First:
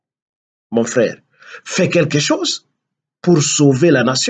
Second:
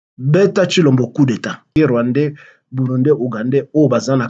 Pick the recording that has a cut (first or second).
second